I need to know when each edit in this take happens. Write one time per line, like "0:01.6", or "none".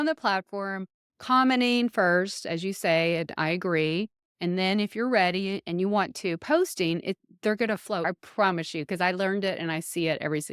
0:08.0